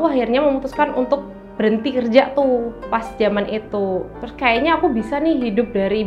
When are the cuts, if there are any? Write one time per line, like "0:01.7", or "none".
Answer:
none